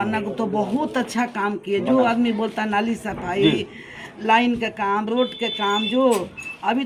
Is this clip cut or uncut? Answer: uncut